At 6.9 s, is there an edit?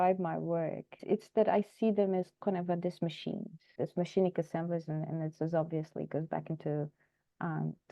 no; 2 cuts; at 1.0 s, 3.7 s

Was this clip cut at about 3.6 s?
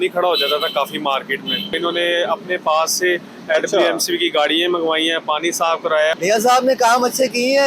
no; 2 cuts; at 1.7 s, 6.1 s

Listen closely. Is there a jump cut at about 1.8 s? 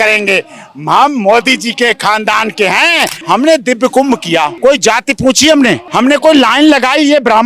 no; 3 cuts; at 3.2 s, 4.5 s, 5.9 s

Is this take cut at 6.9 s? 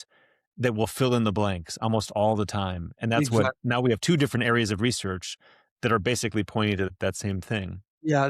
yes; 1 cut; at 6.9 s

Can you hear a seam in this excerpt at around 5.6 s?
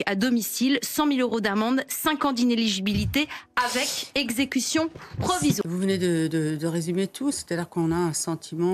yes; 1 cut; at 5.6 s

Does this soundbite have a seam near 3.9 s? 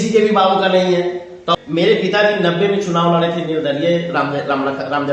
no; 1 cut; at 1.5 s

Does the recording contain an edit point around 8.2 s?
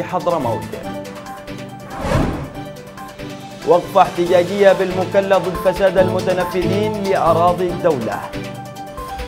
yes; 1 cut; at 8.2 s

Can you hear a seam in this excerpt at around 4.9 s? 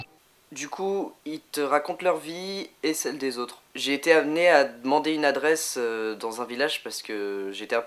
no; 1 cut; at 2.3 s

